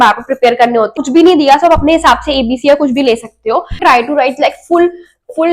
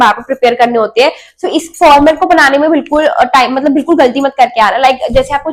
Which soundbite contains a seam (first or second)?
first